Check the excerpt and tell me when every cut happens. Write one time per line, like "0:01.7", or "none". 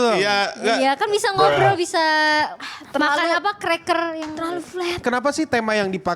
0:05.0